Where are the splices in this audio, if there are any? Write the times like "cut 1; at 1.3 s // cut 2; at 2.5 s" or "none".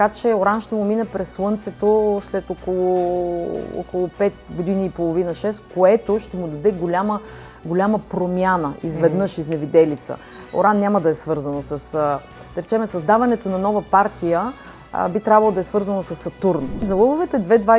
cut 1; at 16.8 s